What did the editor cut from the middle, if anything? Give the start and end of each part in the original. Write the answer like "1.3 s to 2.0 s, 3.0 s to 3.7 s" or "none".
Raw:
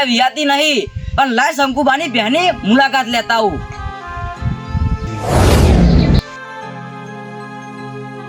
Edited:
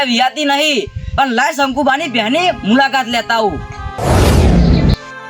3.9 s to 5.2 s